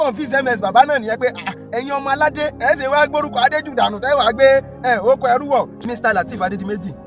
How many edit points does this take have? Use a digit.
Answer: 1